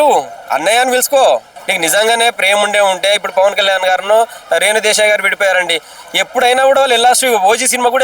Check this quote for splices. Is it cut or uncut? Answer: cut